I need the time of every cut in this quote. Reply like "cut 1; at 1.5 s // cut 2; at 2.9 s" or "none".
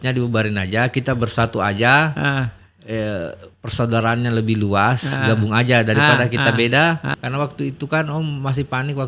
cut 1; at 7.1 s